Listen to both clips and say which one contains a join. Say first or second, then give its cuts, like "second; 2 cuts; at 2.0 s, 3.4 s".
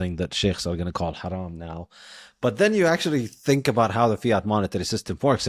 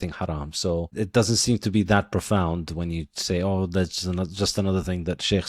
second; 1 cut; at 0.9 s